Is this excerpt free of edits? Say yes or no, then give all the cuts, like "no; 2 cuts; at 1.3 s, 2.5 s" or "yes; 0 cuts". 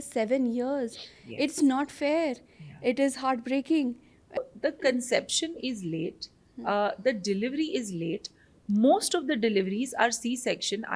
no; 1 cut; at 4.4 s